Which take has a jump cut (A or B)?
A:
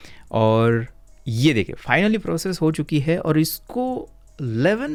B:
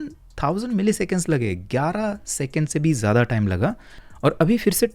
B